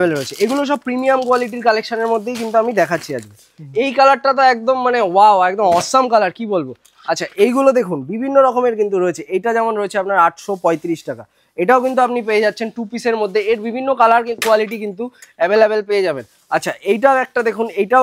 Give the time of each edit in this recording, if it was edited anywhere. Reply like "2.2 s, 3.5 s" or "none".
none